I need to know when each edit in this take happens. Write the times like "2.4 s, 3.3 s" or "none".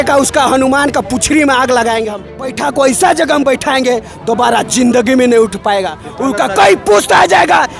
2.6 s